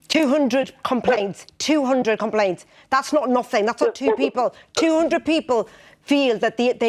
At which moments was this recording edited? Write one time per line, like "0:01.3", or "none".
none